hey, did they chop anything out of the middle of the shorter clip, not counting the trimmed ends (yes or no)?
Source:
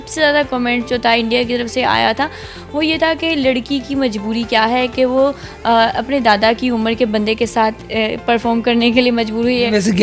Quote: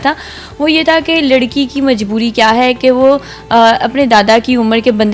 no